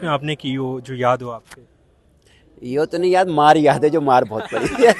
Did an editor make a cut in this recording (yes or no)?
no